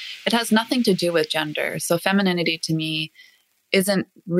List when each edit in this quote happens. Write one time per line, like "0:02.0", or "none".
none

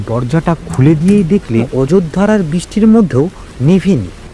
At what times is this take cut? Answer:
0:01.7

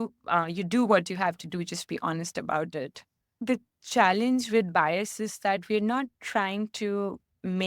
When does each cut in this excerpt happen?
0:03.4

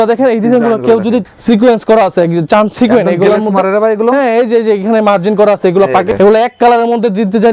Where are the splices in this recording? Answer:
0:01.2
0:06.1

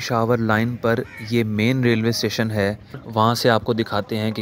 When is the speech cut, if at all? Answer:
0:03.0

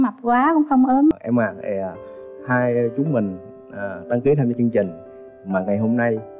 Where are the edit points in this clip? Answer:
0:01.1

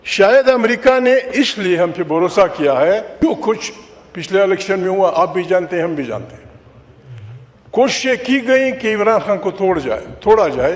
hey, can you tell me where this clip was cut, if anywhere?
0:03.1

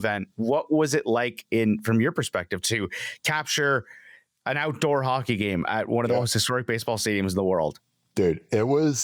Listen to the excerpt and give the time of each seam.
none

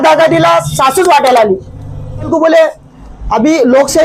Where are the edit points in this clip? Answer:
0:02.3

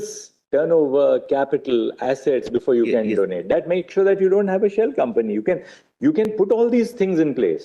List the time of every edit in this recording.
none

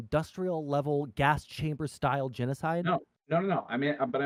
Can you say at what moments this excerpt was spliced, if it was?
none

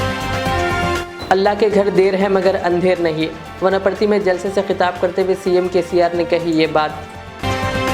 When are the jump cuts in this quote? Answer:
0:01.0

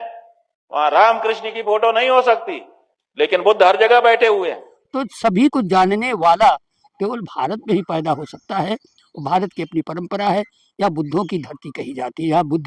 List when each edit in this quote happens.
none

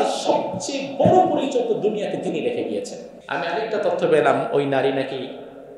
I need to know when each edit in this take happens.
0:03.2

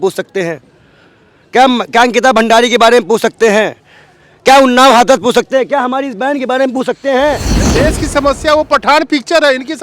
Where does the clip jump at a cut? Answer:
0:07.6

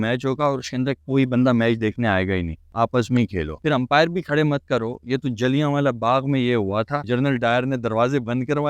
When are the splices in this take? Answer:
0:03.6

